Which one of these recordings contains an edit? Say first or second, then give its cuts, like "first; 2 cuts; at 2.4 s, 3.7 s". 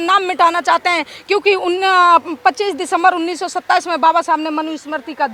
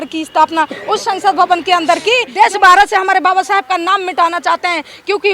second; 1 cut; at 2.3 s